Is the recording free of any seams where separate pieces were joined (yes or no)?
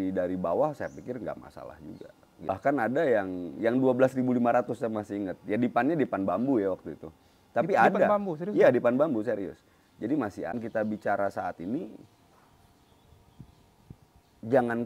no